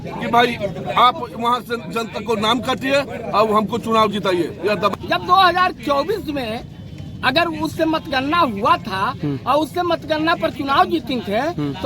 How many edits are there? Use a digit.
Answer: 1